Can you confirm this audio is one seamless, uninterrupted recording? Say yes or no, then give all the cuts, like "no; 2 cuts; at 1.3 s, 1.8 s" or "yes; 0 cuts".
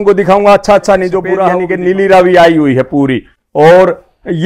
no; 1 cut; at 1.6 s